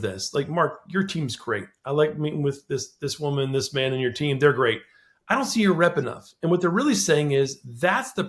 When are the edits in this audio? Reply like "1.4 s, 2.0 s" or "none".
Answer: none